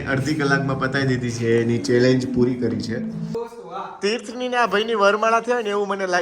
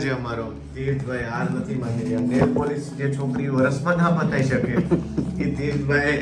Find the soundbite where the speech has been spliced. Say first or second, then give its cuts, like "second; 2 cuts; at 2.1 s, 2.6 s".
first; 1 cut; at 3.3 s